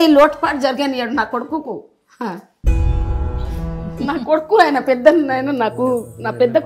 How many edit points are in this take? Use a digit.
0